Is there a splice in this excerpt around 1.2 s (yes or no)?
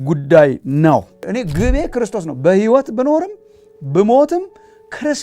yes